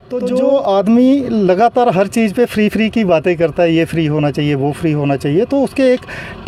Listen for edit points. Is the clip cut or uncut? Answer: uncut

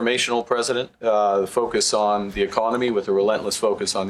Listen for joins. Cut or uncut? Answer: uncut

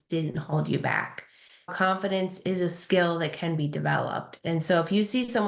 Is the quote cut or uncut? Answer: cut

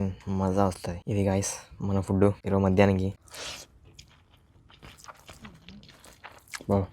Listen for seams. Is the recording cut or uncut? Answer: cut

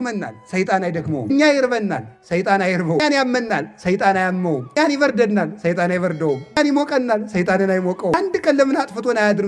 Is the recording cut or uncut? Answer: cut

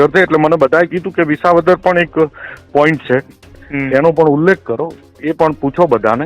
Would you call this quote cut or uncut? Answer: uncut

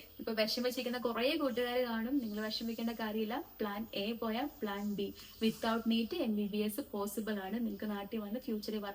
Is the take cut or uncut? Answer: uncut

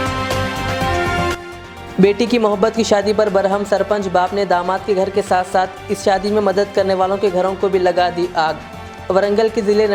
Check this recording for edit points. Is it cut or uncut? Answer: uncut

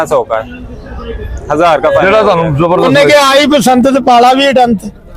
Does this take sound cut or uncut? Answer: cut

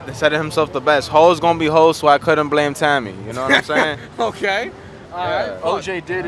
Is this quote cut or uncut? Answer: uncut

